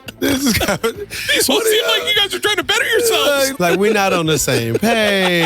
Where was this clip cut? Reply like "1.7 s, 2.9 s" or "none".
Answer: 3.5 s